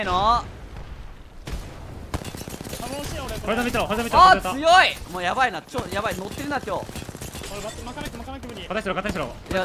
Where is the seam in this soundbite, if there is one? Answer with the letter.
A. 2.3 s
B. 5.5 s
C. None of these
C